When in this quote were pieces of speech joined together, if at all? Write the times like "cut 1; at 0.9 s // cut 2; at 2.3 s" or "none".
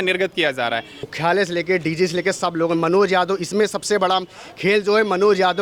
cut 1; at 1.1 s

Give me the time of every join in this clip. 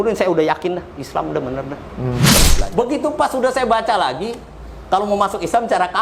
cut 1; at 2.4 s

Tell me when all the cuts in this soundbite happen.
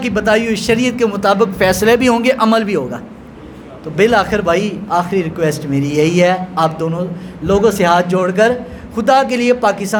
none

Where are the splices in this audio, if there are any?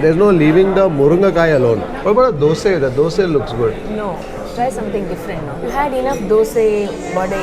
cut 1; at 1.9 s

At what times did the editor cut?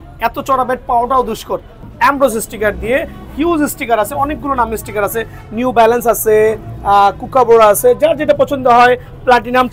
cut 1; at 1.8 s

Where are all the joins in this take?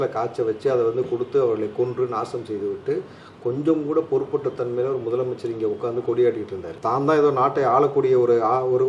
none

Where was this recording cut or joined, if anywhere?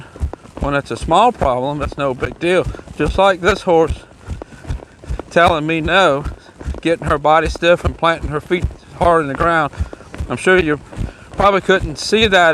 none

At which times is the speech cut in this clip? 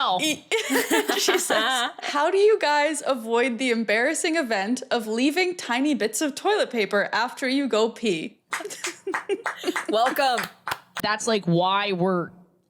cut 1; at 2.1 s // cut 2; at 8.5 s // cut 3; at 11.0 s

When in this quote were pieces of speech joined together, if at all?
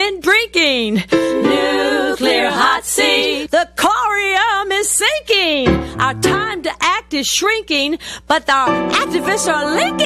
none

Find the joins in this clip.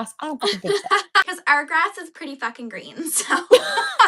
cut 1; at 1.3 s

